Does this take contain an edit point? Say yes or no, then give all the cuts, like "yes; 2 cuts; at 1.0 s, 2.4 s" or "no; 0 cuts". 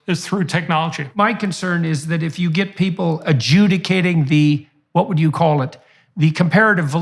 yes; 1 cut; at 1.2 s